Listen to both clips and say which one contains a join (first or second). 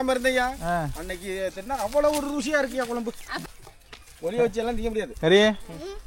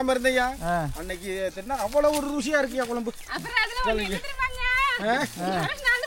first